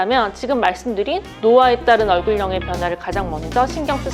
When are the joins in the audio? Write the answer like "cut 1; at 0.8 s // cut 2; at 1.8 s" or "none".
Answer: none